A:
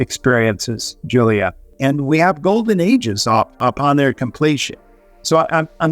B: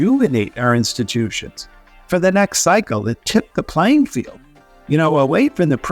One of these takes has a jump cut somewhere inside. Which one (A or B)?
A